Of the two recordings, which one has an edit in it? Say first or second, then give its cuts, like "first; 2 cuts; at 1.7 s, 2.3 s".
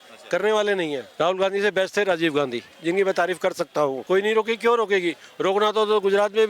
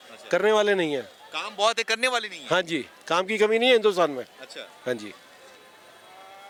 first; 2 cuts; at 1.1 s, 4.0 s